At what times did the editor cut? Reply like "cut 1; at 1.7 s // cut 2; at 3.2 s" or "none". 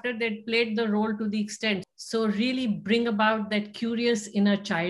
cut 1; at 1.8 s